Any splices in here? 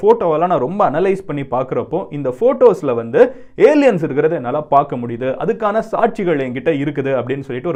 no; 0 cuts

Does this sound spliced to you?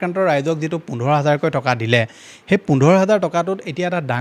no; 0 cuts

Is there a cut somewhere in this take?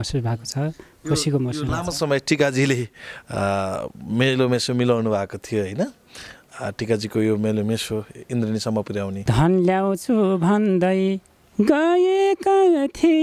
yes; 1 cut; at 9.2 s

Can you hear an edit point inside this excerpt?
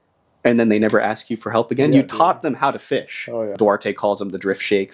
yes; 1 cut; at 3.5 s

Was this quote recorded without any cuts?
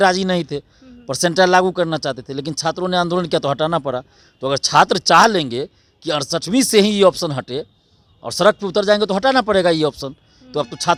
yes; 0 cuts

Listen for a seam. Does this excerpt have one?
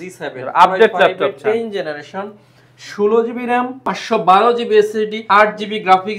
yes; 2 cuts; at 3.9 s, 5.2 s

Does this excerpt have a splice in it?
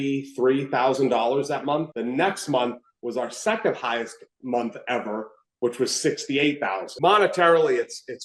yes; 1 cut; at 6.9 s

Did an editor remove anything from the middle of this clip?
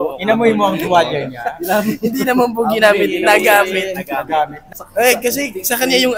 yes; 1 cut; at 4.6 s

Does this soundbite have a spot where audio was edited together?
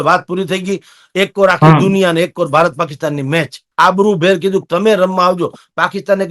yes; 1 cut; at 3.6 s

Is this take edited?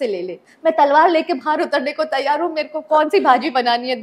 no; 0 cuts

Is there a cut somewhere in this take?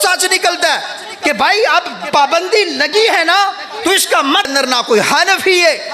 yes; 1 cut; at 4.5 s

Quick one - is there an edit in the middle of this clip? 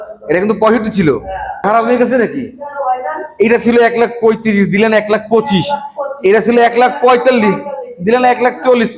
yes; 1 cut; at 1.6 s

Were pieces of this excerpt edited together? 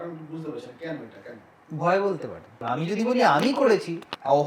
yes; 1 cut; at 2.6 s

